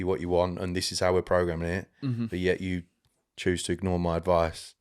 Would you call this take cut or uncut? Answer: uncut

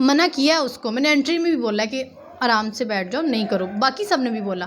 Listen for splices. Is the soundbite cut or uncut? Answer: uncut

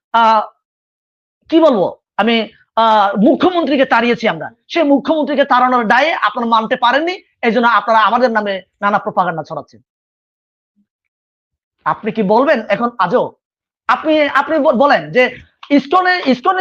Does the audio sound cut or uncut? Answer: uncut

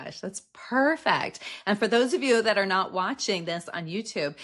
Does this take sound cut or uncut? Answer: uncut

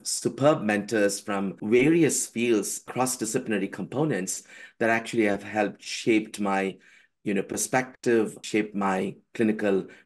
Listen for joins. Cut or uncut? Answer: cut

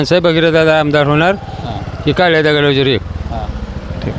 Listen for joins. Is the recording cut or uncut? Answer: uncut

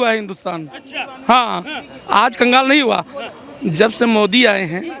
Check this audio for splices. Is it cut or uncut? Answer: uncut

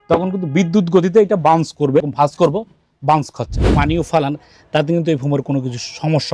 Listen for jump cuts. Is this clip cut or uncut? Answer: cut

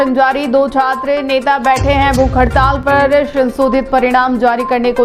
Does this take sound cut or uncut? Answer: uncut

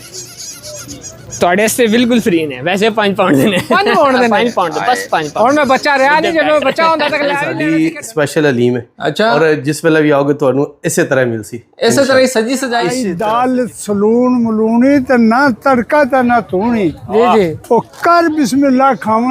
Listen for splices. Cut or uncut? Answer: cut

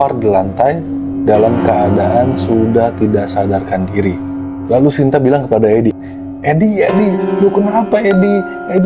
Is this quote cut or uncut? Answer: uncut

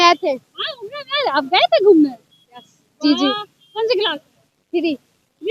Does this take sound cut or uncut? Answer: uncut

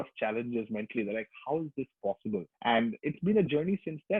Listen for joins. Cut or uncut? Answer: uncut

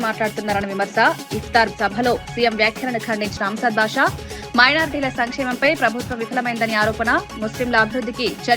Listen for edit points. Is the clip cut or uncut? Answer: uncut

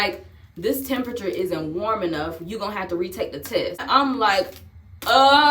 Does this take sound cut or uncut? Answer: cut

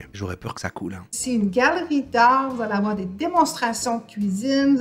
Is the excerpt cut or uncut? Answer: uncut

